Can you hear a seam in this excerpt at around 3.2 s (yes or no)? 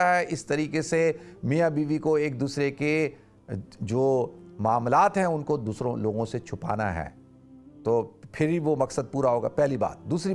no